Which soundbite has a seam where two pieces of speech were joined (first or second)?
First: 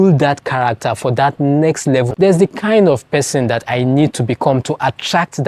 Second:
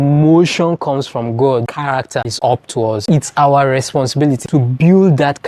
first